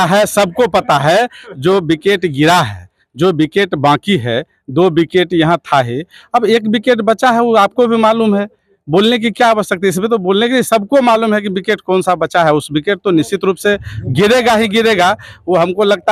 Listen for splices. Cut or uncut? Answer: uncut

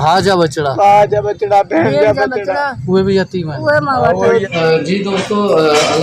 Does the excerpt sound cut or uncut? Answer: cut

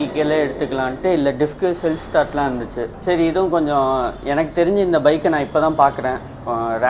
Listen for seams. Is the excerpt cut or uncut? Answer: cut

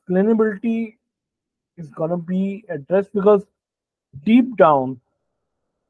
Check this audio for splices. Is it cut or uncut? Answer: uncut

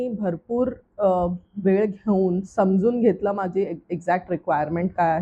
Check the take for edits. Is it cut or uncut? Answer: uncut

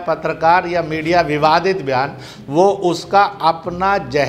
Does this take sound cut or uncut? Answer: uncut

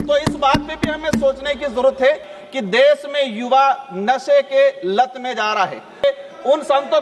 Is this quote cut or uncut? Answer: cut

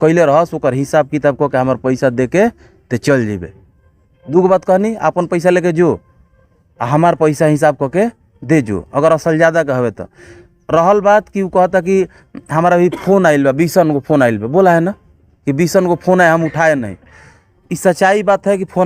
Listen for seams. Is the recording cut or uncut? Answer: uncut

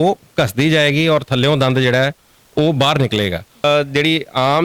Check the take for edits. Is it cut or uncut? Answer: cut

